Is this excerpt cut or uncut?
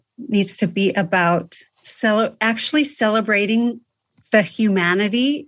uncut